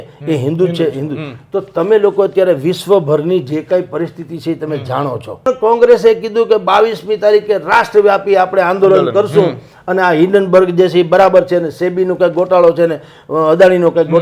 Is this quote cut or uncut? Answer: cut